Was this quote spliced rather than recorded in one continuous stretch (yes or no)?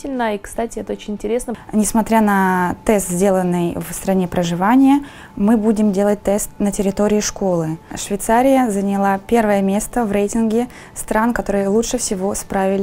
yes